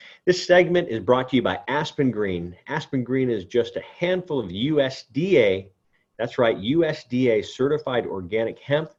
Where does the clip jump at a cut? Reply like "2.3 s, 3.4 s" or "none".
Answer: none

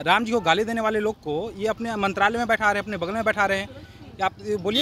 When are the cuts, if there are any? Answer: none

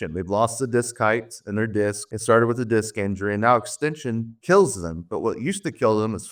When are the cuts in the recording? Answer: none

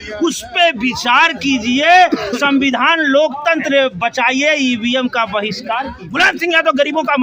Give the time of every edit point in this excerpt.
6.0 s

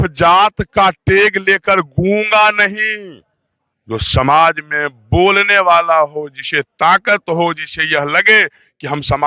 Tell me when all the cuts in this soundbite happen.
none

